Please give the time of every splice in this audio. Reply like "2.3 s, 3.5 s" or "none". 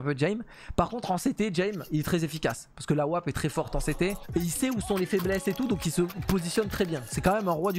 4.2 s